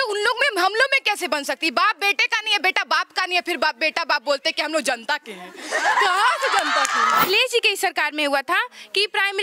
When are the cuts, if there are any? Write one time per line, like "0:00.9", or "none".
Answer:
0:07.2